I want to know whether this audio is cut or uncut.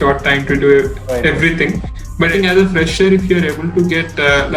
cut